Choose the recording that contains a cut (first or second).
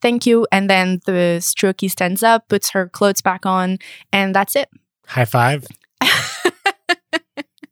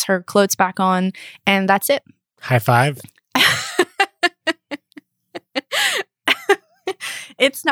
first